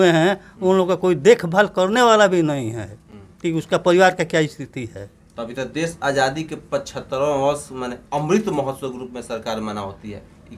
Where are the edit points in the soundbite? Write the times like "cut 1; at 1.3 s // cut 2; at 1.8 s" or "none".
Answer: none